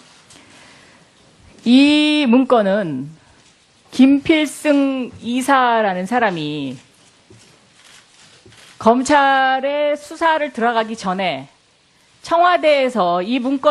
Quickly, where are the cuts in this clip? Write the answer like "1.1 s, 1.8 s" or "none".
1.1 s